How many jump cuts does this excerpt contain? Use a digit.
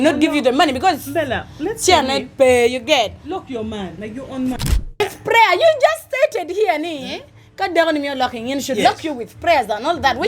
1